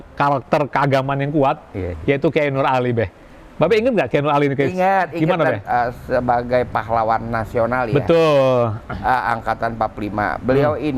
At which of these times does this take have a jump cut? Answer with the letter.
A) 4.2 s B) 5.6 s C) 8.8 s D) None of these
B